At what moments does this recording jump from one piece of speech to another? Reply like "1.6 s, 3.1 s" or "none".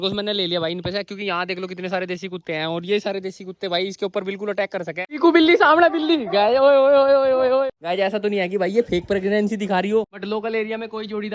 5.1 s, 7.7 s, 10.2 s